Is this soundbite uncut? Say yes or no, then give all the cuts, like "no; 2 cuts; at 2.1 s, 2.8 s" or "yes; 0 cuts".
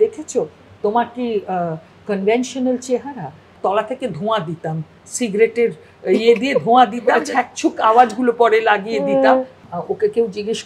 no; 3 cuts; at 3.5 s, 7.2 s, 9.6 s